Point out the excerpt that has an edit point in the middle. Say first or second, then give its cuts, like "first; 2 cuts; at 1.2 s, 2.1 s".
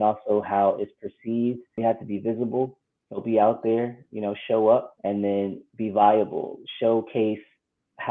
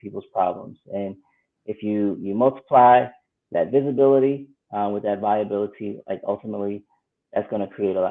first; 2 cuts; at 1.8 s, 5.0 s